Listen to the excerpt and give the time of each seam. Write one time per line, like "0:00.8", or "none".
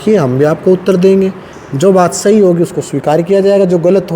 none